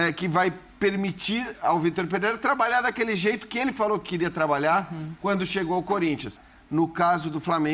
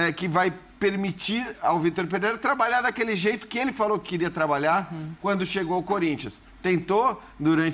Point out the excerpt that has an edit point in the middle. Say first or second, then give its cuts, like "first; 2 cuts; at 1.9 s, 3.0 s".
first; 1 cut; at 6.5 s